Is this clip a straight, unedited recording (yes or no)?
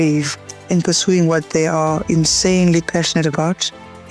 yes